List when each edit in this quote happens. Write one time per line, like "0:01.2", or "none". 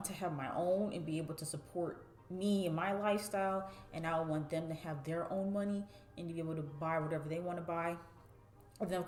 none